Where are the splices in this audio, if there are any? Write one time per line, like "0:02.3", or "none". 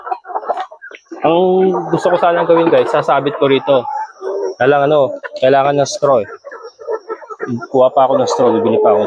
none